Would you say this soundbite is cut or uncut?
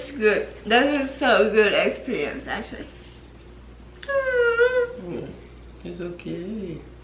uncut